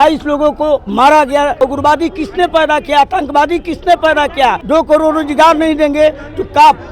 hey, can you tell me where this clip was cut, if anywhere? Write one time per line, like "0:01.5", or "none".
0:01.6
0:04.6